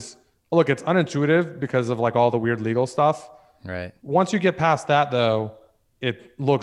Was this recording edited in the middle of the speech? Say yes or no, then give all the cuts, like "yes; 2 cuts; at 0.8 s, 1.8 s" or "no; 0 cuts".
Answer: no; 0 cuts